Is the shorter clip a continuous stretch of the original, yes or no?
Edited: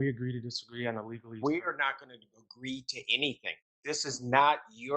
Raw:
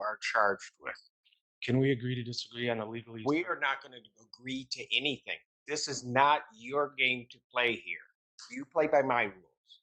yes